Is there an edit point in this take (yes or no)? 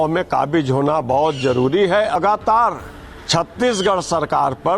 yes